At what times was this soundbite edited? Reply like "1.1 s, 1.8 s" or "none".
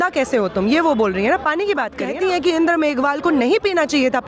2.0 s